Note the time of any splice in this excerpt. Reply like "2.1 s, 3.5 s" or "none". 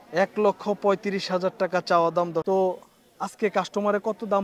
2.4 s

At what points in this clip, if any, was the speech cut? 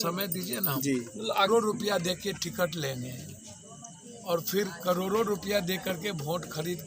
1.5 s

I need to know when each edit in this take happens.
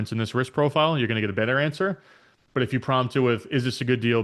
none

